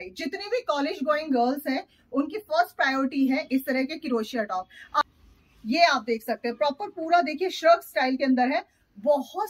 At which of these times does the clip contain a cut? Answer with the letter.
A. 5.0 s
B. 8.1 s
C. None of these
A